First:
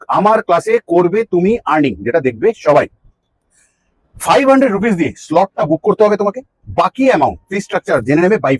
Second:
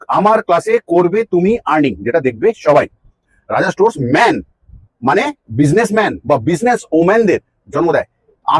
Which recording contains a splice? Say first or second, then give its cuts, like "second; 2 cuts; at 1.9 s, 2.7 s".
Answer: second; 1 cut; at 3.3 s